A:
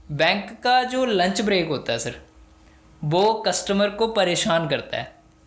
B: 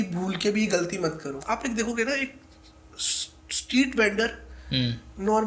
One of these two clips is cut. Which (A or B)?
B